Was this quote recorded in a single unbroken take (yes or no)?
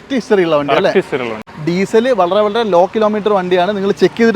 no